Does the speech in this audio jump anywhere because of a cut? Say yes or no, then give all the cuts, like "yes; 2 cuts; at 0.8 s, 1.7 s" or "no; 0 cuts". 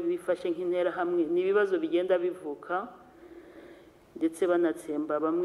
no; 0 cuts